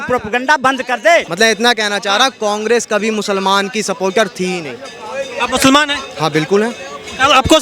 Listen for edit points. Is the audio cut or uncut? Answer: cut